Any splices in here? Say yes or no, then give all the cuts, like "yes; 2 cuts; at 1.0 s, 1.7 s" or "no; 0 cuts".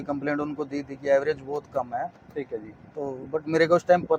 no; 0 cuts